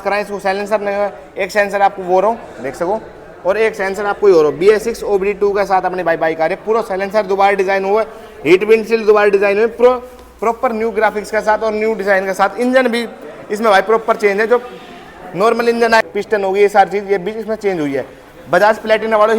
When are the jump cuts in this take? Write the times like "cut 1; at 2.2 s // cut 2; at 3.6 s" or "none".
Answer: cut 1; at 16.0 s

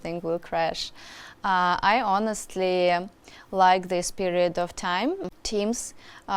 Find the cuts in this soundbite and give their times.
cut 1; at 5.3 s

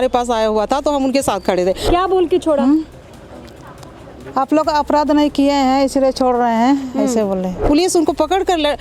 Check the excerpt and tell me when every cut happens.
cut 1; at 1.8 s // cut 2; at 7.6 s

